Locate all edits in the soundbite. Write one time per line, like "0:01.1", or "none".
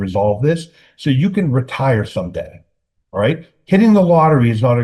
none